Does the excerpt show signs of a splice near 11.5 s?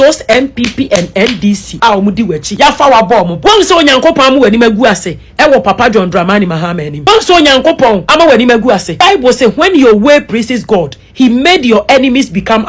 no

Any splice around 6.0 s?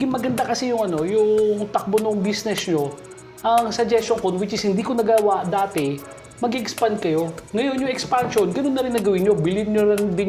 no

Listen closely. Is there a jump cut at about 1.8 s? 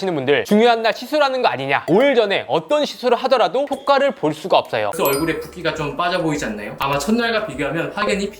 yes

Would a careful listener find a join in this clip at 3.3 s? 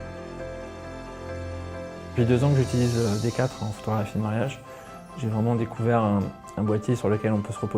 yes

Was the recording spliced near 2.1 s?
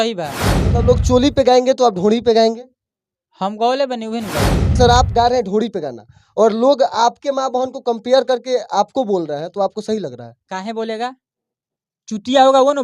no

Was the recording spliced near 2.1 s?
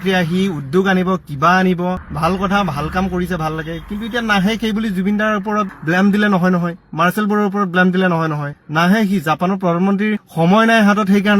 yes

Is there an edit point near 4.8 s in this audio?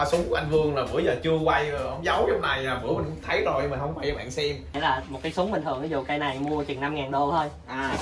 yes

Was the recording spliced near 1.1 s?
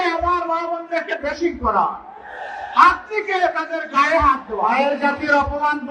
no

